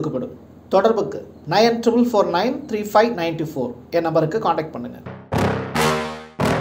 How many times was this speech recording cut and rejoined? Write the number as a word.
one